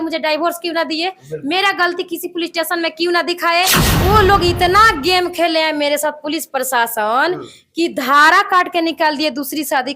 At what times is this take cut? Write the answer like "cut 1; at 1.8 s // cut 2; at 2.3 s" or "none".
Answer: cut 1; at 3.8 s